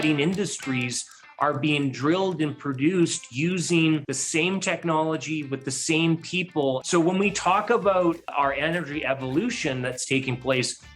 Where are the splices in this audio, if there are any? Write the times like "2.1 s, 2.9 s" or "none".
4.2 s, 6.8 s